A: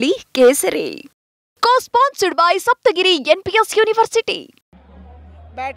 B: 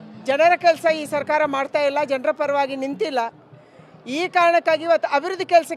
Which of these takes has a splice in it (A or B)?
A